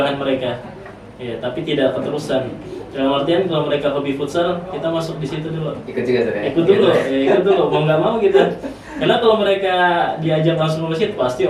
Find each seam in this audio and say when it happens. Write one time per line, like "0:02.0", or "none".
none